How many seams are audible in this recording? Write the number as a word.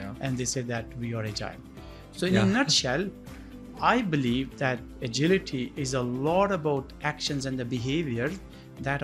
zero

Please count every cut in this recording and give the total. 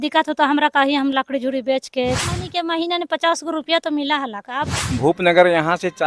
two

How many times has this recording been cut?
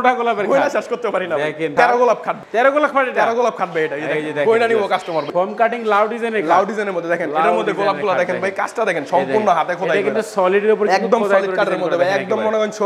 three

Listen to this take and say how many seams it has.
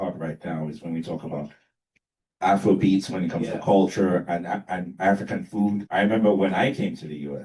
one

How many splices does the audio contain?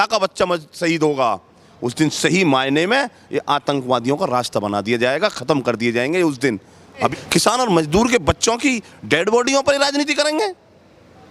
one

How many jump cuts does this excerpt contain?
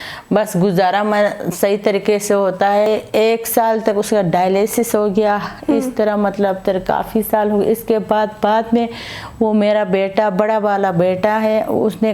one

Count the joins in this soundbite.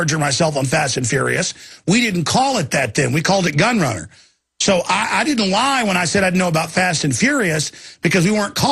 zero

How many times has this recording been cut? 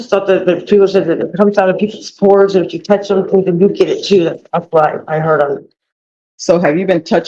zero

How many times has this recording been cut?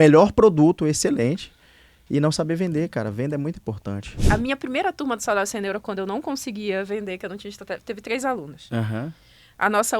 one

